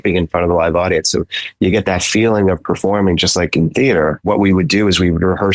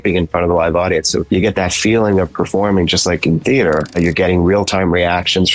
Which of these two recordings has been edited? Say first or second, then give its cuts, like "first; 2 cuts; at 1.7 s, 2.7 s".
second; 2 cuts; at 1.2 s, 3.9 s